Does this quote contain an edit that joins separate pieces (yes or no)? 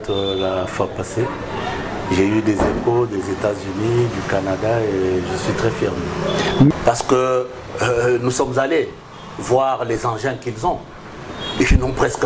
yes